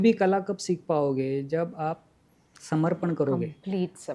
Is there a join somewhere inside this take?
no; 0 cuts

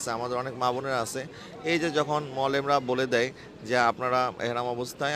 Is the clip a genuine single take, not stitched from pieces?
yes; 0 cuts

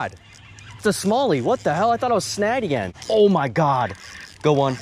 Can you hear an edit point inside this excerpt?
yes; 1 cut; at 2.9 s

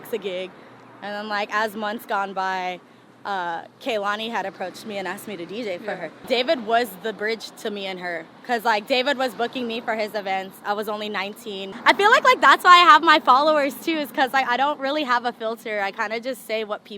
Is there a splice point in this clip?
yes; 2 cuts; at 6.2 s, 11.7 s

